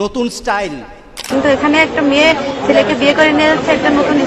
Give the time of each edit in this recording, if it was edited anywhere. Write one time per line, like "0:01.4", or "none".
0:01.3